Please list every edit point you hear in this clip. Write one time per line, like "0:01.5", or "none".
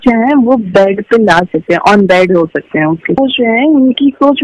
0:03.2

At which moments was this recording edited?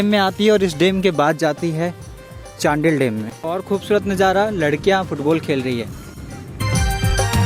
0:03.4
0:06.6

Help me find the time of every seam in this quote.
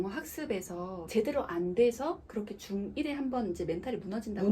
0:00.9

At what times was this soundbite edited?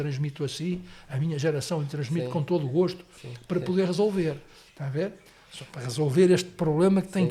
none

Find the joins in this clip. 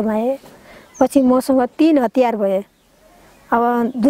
none

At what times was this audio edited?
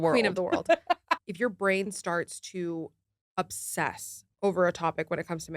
0:01.1

